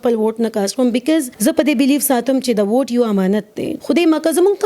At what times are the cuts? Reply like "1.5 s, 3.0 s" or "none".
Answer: 1.3 s, 3.7 s